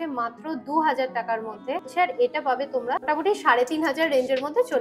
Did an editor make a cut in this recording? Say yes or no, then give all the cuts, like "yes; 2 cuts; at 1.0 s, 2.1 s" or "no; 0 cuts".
yes; 2 cuts; at 1.9 s, 3.1 s